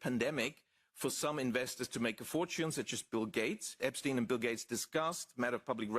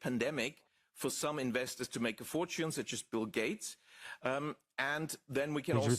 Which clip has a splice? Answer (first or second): first